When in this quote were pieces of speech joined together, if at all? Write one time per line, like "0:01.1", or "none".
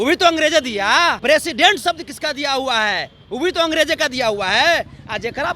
0:01.2

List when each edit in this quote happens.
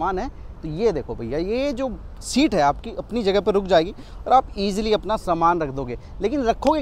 none

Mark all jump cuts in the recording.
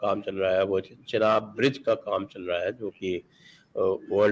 none

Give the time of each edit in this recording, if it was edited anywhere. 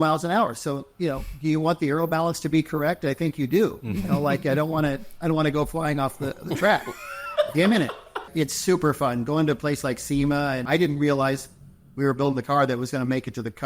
0:08.3
0:10.6

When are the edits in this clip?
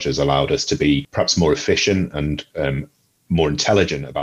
0:01.1

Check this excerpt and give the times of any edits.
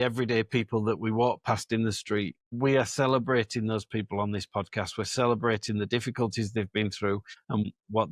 0:02.5

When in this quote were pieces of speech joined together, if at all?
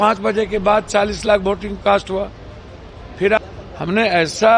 0:03.4

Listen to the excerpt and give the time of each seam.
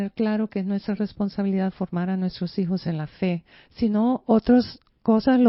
none

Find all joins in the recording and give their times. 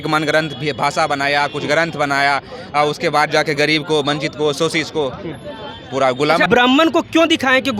0:06.5

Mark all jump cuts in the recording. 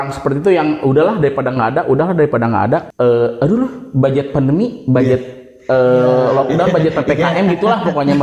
0:02.9

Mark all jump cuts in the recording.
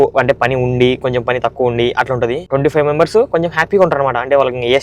0:02.4

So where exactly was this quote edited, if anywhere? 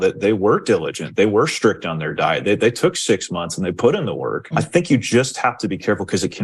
0:04.5

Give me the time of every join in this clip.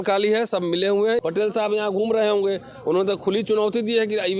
0:01.2

